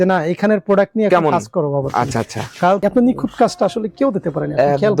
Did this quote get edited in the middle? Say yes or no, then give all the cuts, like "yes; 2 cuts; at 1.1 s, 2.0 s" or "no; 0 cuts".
yes; 1 cut; at 2.8 s